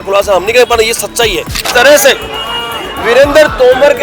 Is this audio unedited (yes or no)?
no